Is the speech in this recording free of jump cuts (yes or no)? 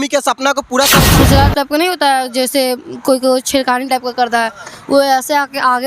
no